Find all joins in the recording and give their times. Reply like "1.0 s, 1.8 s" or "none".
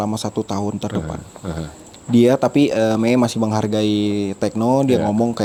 none